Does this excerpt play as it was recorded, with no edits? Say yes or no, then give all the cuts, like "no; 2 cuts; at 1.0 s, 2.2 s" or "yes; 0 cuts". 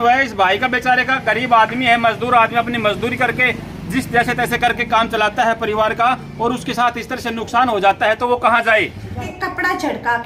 no; 1 cut; at 9.2 s